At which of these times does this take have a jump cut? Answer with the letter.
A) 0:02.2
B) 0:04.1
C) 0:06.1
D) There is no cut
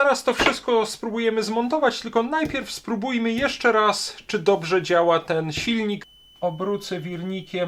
C